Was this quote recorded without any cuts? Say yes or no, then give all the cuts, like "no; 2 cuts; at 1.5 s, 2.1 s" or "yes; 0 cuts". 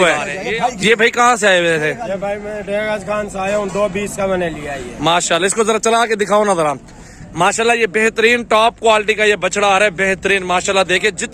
yes; 0 cuts